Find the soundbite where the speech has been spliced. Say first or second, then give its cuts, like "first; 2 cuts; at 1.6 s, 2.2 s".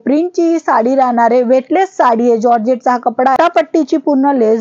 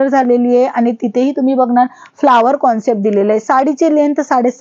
first; 1 cut; at 3.3 s